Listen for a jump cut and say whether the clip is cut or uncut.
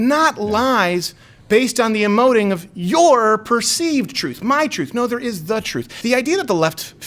cut